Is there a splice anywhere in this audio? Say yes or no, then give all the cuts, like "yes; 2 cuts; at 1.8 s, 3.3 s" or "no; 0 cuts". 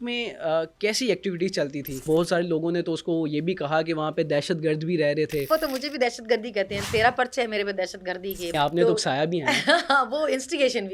yes; 3 cuts; at 2.0 s, 5.5 s, 8.5 s